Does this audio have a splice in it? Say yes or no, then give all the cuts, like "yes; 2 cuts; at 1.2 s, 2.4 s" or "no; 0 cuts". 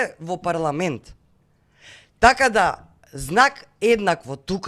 no; 0 cuts